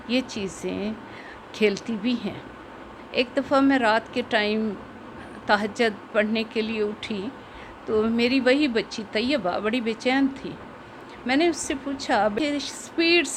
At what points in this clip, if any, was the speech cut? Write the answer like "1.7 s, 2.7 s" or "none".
12.3 s